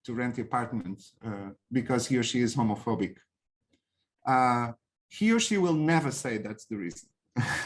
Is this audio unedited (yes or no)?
yes